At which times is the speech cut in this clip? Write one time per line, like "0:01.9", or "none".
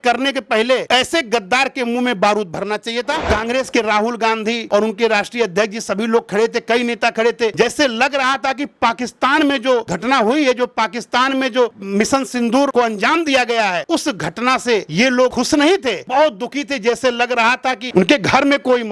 0:03.2
0:04.6
0:17.8

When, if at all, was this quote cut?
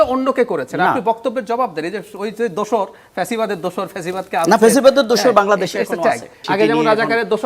0:06.4

